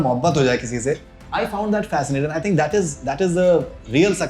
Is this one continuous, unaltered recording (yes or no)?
no